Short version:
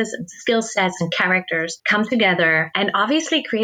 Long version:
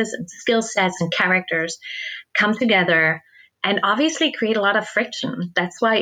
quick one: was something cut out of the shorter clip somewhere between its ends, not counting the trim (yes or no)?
yes